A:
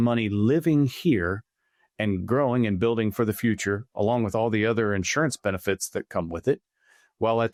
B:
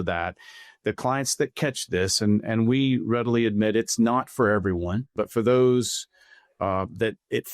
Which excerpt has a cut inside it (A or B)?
B